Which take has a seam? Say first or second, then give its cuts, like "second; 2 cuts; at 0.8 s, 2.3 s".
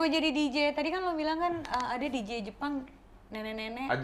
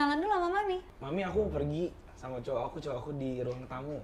second; 1 cut; at 0.9 s